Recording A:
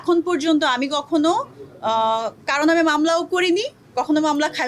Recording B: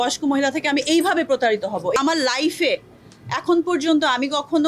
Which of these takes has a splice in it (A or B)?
B